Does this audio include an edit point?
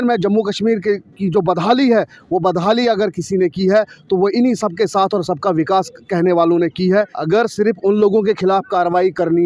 yes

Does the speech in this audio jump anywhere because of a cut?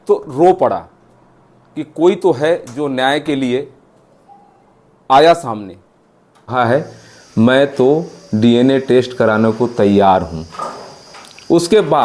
yes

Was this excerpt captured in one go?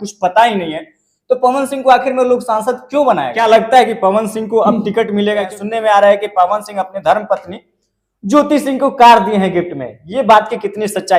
no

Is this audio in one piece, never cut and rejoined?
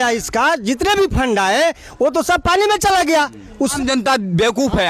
no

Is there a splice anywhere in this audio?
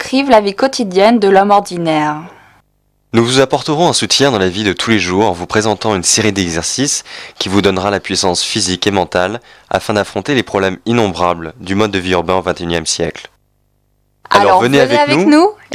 yes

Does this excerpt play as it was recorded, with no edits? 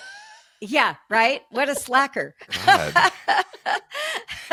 yes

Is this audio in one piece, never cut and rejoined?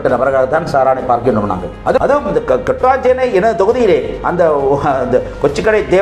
no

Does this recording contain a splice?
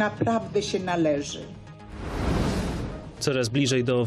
no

